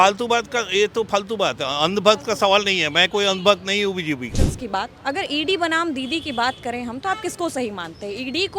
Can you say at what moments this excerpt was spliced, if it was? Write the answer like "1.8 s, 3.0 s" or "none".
4.4 s